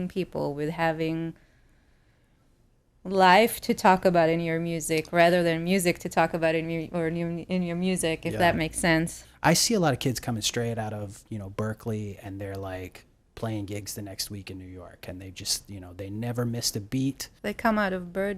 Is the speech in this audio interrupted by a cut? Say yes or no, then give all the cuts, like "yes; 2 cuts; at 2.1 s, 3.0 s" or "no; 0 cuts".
yes; 2 cuts; at 9.2 s, 17.3 s